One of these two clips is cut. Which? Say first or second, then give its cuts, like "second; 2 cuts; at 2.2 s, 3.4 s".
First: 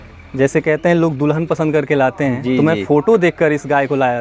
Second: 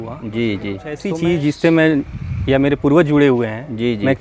second; 1 cut; at 1.1 s